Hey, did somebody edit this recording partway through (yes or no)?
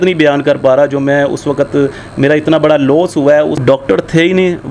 yes